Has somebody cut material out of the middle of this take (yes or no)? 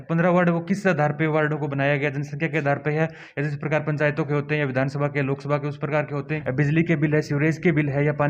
yes